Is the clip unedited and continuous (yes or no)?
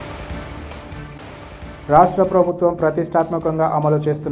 no